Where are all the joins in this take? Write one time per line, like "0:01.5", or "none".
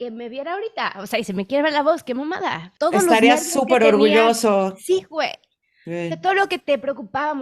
0:02.7